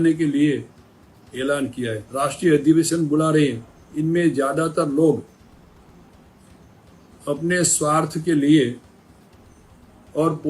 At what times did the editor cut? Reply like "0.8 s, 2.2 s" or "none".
2.0 s